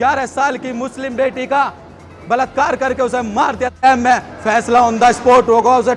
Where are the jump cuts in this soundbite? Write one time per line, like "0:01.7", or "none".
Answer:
0:03.8